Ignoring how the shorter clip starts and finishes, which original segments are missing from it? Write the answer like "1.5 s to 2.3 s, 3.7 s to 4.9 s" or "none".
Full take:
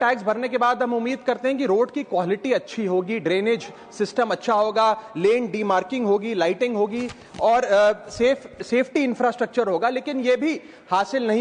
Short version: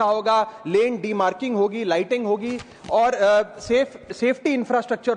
none